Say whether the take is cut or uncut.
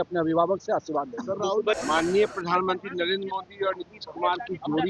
cut